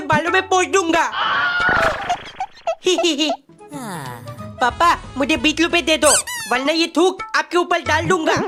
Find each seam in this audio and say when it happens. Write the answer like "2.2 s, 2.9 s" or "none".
none

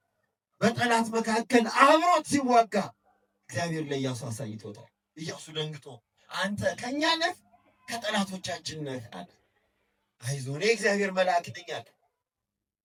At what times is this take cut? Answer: none

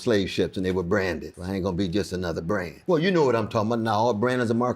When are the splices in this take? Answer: 1.3 s, 2.7 s

